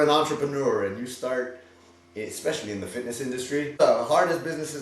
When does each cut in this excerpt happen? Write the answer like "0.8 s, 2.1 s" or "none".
3.8 s